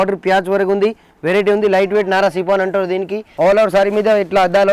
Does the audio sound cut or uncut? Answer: cut